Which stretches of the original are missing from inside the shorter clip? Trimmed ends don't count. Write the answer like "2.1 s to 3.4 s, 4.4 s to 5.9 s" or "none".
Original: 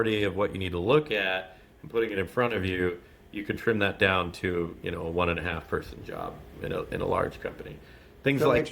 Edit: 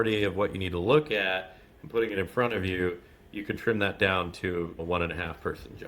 4.8 s to 5.0 s